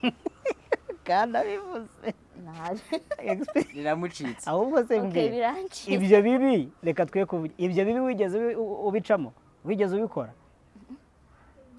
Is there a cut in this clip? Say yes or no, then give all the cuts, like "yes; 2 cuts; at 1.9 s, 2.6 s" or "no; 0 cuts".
no; 0 cuts